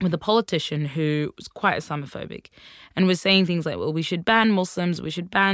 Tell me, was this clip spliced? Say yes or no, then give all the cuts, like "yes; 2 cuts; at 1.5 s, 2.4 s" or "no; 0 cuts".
no; 0 cuts